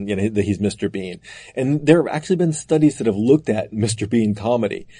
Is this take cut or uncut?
uncut